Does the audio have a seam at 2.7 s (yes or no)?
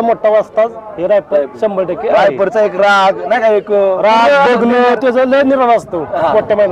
no